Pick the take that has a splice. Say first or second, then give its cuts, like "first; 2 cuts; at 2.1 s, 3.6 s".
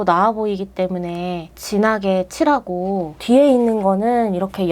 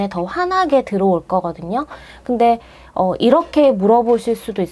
first; 2 cuts; at 1.5 s, 3.1 s